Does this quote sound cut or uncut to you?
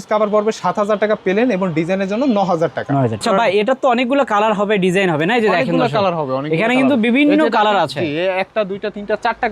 cut